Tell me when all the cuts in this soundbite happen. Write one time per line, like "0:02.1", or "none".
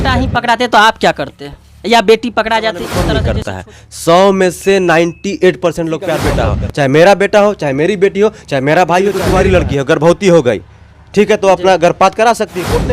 0:03.1
0:06.3
0:09.2